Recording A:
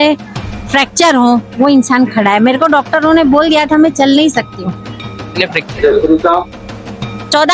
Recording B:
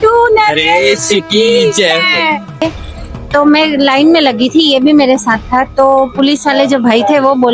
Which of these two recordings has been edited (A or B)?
B